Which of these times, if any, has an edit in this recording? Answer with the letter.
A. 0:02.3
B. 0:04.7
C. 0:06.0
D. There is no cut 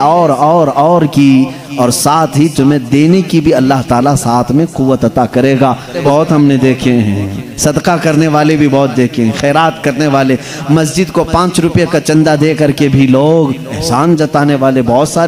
C